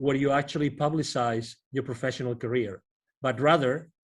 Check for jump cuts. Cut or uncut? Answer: uncut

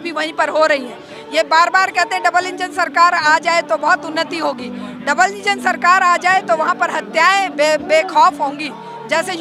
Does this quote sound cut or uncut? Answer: uncut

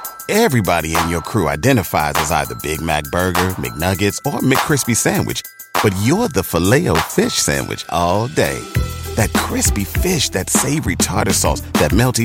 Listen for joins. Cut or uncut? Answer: uncut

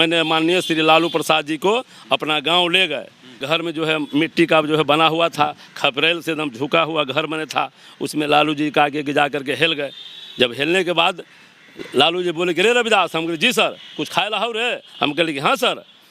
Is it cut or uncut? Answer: cut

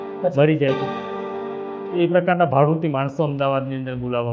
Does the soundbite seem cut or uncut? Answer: uncut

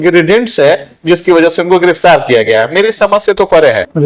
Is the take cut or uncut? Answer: uncut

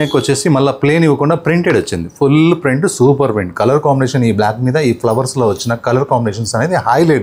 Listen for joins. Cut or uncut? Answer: uncut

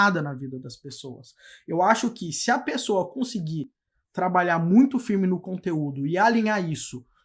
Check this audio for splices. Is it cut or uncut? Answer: uncut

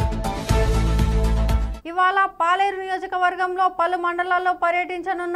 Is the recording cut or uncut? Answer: cut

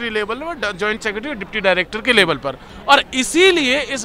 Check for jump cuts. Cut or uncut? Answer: cut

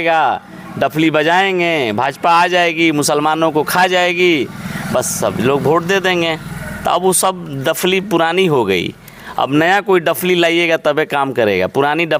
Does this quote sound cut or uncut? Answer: uncut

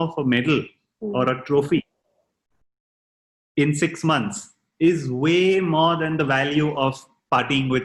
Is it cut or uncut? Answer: uncut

